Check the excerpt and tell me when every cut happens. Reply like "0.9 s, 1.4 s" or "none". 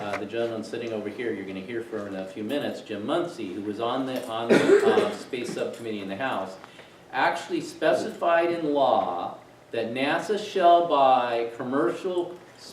9.4 s